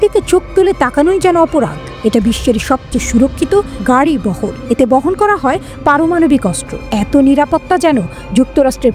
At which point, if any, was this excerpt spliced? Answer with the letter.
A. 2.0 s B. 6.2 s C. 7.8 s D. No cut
D